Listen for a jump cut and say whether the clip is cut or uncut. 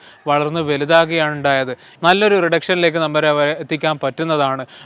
cut